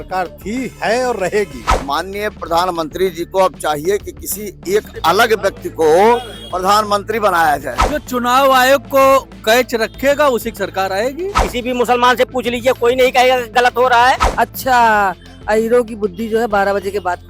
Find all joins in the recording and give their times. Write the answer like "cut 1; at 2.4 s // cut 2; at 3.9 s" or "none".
cut 1; at 1.6 s // cut 2; at 7.7 s // cut 3; at 11.4 s // cut 4; at 14.3 s